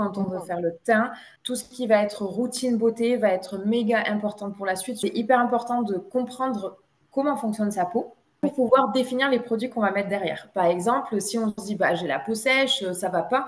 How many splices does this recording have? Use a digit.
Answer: 3